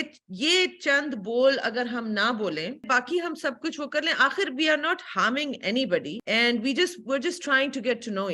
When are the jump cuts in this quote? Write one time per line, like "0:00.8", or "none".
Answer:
0:02.8
0:06.2